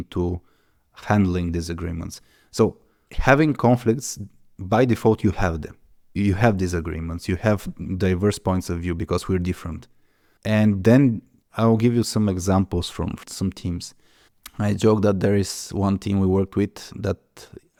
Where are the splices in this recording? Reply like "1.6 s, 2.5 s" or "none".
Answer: none